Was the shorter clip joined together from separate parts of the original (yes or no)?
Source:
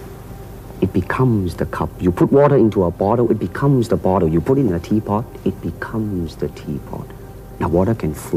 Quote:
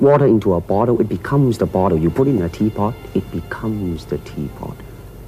no